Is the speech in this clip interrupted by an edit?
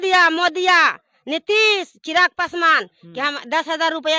no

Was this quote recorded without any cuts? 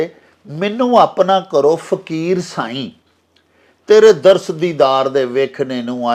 yes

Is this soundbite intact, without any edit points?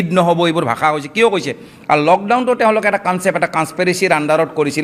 no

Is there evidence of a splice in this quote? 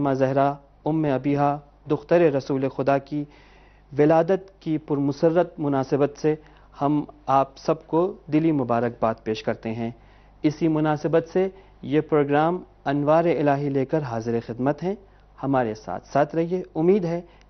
yes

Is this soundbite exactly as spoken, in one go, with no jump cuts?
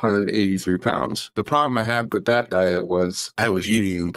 no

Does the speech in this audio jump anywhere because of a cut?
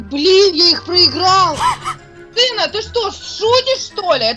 no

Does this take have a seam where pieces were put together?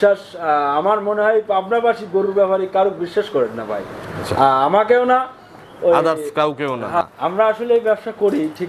yes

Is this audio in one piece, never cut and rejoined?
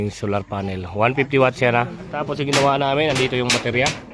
no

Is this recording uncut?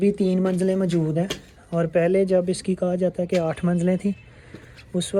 yes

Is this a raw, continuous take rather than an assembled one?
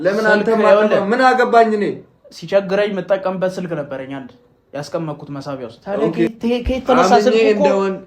no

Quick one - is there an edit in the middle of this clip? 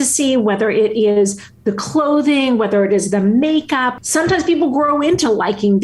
yes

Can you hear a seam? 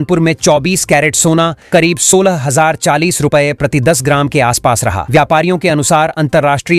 no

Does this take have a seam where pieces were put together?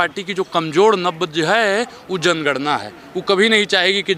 no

